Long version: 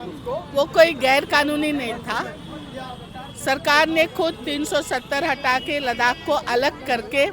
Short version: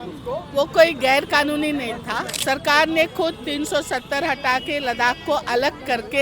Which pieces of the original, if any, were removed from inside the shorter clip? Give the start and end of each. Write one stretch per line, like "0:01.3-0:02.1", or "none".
0:02.3-0:03.3